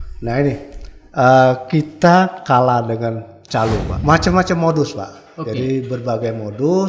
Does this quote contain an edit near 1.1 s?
no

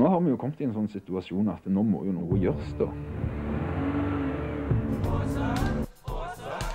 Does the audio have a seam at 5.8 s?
yes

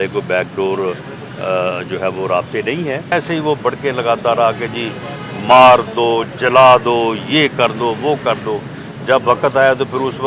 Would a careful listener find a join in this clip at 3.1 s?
yes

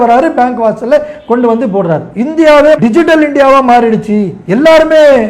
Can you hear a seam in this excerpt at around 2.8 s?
yes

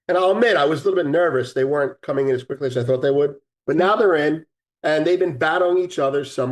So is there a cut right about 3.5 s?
yes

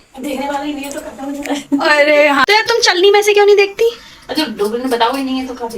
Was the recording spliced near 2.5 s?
yes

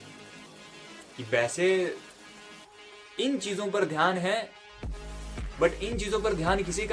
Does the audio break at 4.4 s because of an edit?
no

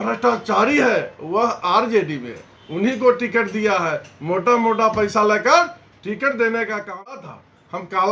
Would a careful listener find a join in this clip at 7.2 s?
yes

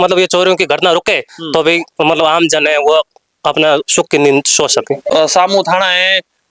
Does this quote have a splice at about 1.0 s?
no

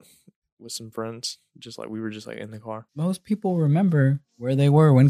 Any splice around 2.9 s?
yes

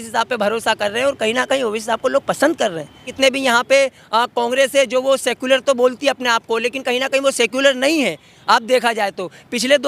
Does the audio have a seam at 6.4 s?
no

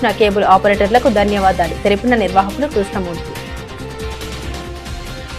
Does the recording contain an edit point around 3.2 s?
yes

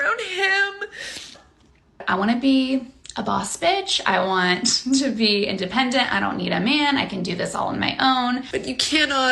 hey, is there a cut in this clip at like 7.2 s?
no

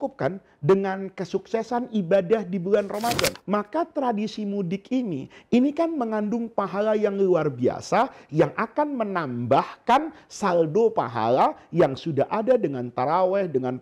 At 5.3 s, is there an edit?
no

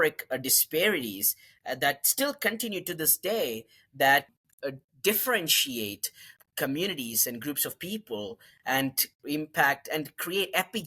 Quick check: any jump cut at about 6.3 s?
yes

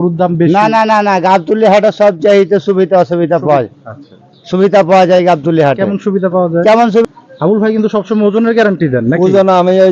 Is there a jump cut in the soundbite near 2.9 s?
no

